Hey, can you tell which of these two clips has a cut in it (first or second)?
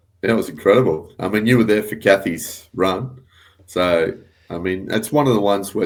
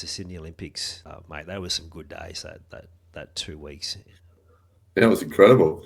second